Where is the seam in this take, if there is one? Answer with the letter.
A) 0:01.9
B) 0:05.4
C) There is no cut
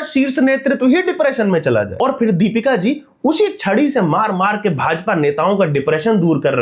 A